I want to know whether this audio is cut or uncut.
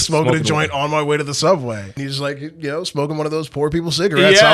cut